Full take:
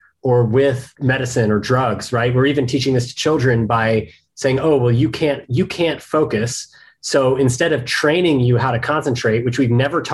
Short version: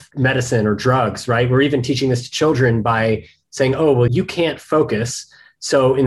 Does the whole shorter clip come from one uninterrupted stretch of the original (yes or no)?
no